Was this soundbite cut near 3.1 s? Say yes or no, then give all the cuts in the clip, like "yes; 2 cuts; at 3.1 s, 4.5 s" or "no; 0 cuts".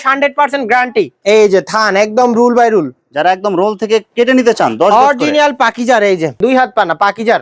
no; 2 cuts; at 1.2 s, 6.4 s